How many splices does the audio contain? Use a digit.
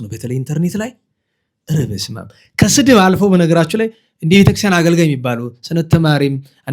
0